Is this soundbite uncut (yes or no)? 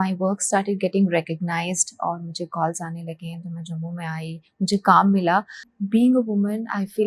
no